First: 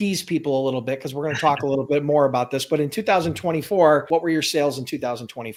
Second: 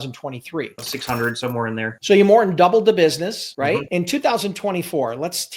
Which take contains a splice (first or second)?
second